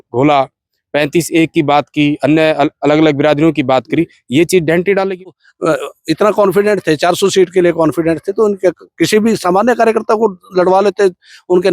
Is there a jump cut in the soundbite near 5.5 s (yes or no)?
yes